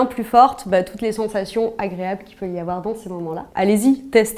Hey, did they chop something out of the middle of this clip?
no; 0 cuts

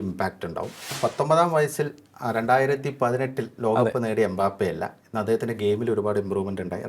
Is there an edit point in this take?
yes; 1 cut; at 0.9 s

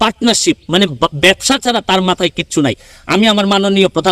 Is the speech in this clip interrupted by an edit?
no; 0 cuts

